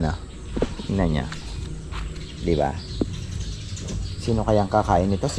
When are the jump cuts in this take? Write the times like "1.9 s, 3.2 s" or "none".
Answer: none

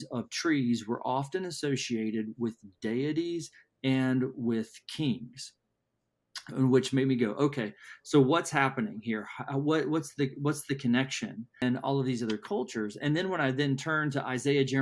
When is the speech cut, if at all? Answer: 11.6 s

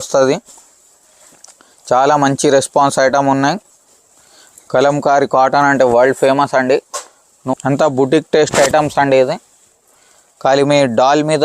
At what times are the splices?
7.5 s

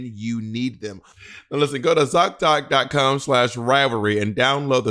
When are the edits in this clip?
1.4 s

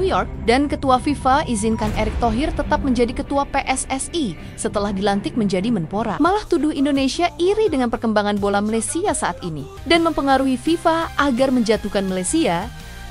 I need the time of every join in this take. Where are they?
6.1 s

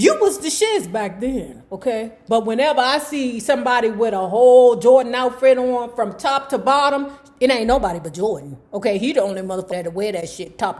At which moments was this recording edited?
9.7 s

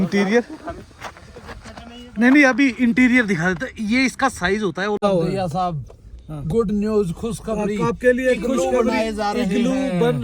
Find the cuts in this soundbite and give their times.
5.0 s

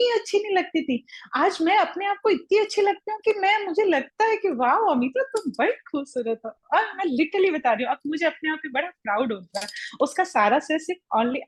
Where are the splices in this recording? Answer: none

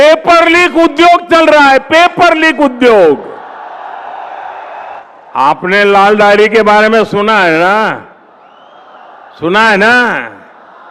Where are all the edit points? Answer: 4.8 s

